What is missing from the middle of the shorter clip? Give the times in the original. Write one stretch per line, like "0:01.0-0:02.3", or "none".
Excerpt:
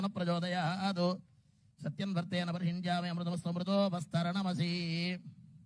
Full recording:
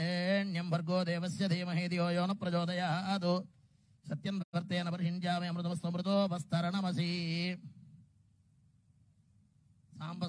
0:04.4-0:04.5